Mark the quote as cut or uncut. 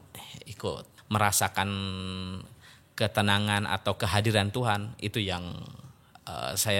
cut